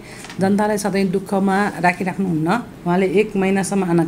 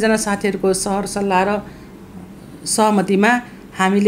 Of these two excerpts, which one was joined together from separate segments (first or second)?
first